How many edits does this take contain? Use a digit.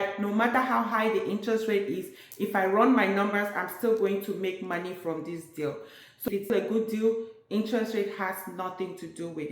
1